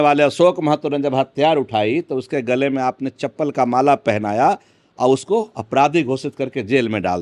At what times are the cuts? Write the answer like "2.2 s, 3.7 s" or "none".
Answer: none

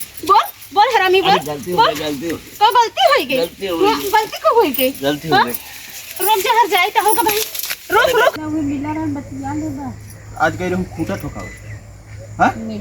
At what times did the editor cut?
8.4 s

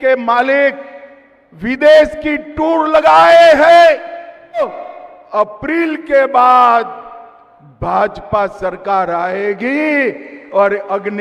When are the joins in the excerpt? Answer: 4.6 s

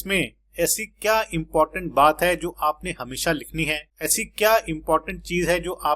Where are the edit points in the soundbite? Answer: none

